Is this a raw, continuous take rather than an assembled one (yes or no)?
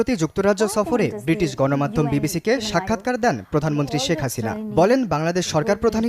yes